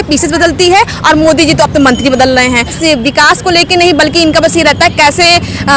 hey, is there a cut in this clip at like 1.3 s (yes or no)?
no